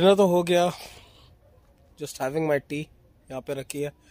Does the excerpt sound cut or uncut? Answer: uncut